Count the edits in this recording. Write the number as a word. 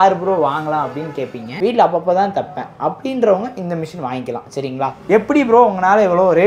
two